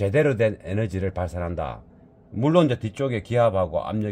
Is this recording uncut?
yes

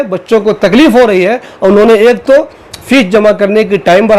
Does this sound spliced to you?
no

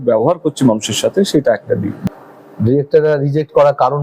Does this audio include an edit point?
yes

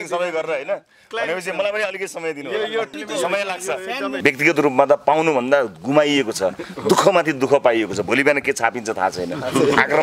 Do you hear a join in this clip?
yes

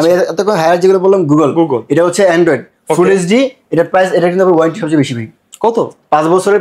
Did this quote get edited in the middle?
no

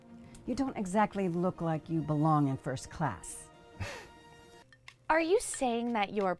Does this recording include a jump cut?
yes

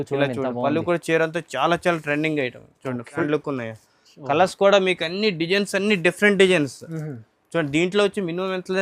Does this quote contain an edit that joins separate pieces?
yes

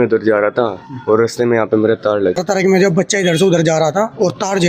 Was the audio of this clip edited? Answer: yes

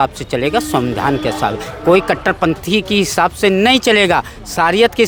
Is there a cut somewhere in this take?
no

